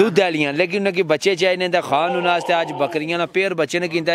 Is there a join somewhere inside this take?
no; 0 cuts

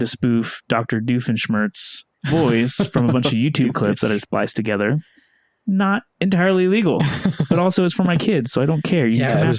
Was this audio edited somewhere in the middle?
no; 0 cuts

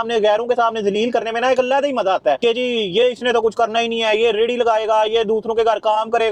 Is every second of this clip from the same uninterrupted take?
yes; 0 cuts

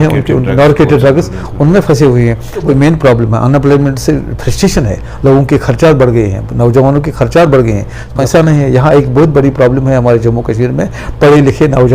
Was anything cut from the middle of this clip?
yes; 2 cuts; at 2.6 s, 8.1 s

